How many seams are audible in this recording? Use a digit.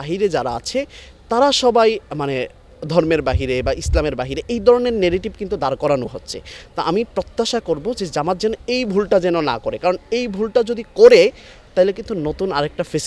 0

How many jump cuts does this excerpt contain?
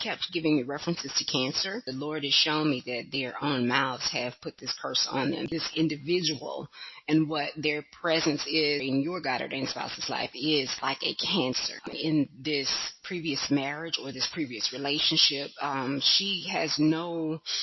4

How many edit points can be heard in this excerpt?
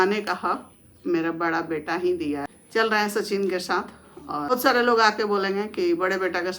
2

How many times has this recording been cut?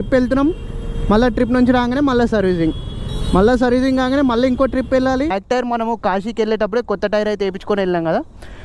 1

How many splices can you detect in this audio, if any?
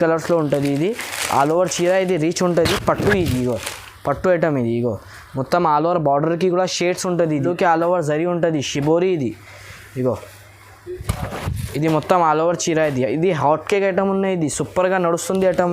1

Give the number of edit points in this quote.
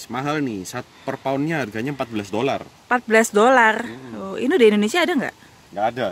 0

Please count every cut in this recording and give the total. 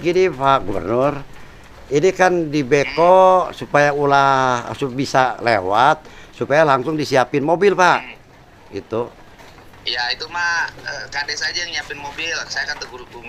0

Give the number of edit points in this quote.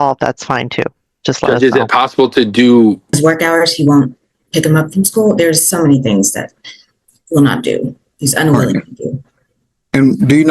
1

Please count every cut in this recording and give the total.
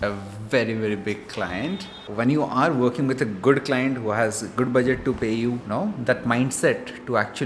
2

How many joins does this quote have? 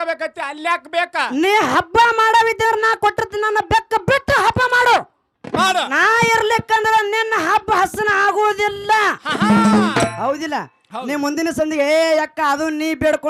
1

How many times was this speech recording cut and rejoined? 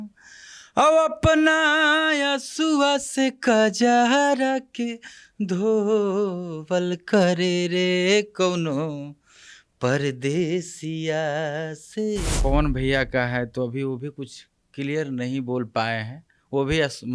1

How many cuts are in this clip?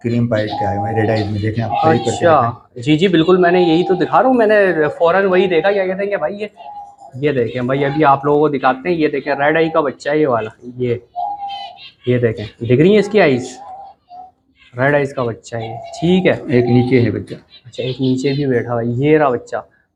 0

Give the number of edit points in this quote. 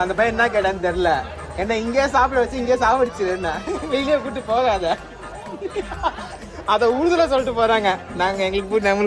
0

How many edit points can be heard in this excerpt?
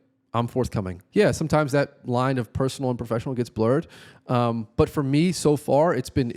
1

